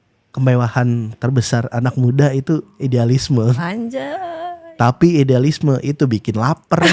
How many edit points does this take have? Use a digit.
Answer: 0